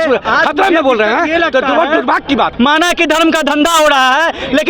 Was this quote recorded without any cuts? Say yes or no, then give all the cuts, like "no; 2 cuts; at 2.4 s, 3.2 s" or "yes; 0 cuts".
no; 1 cut; at 2.5 s